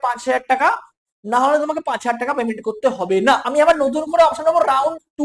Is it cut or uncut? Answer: cut